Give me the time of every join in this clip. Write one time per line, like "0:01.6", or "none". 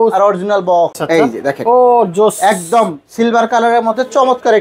0:01.0

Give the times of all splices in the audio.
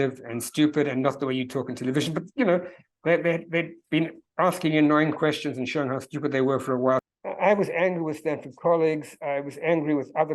0:07.0

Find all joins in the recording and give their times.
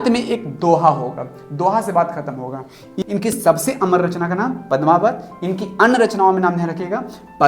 0:02.9

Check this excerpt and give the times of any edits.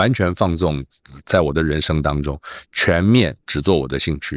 none

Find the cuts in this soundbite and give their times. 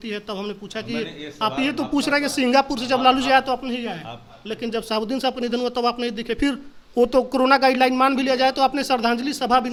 none

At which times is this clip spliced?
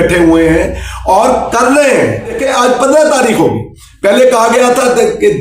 0:02.4

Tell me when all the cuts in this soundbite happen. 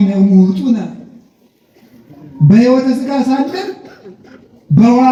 none

